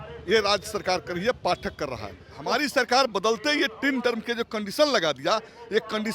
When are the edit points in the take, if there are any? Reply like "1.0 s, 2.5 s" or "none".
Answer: 2.3 s